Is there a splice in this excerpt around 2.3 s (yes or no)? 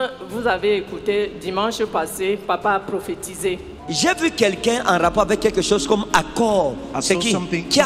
no